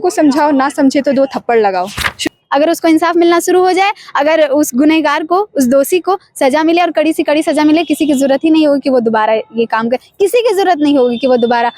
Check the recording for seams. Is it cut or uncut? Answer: cut